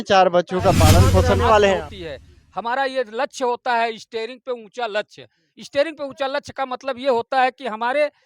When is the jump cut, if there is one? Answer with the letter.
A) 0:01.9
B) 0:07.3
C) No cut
A